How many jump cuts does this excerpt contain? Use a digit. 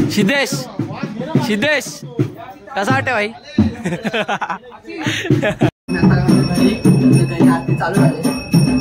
0